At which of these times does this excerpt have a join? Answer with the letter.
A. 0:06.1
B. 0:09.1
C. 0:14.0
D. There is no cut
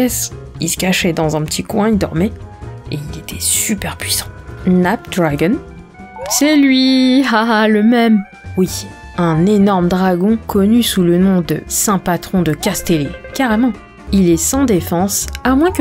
C